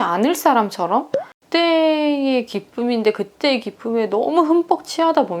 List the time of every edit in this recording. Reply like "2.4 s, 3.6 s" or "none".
1.3 s